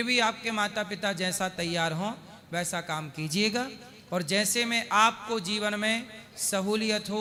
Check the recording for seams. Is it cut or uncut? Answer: uncut